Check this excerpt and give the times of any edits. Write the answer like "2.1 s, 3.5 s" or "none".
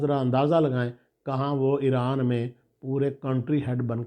none